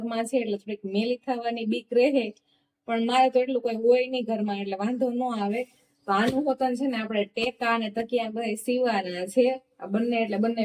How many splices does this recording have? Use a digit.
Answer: 0